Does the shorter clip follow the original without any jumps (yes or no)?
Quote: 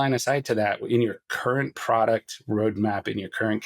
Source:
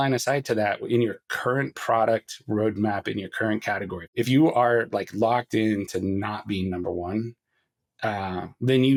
yes